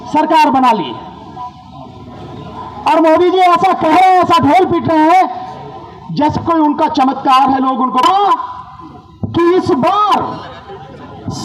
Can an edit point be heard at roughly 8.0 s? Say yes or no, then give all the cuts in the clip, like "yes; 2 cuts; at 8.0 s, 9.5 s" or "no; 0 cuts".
yes; 1 cut; at 8.0 s